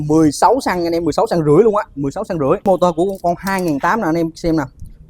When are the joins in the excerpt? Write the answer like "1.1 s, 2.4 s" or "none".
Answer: 2.7 s